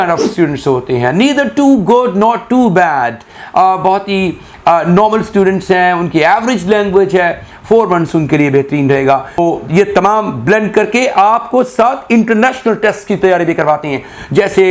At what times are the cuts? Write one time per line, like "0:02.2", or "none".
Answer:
0:09.4